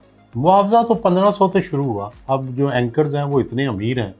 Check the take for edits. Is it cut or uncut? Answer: cut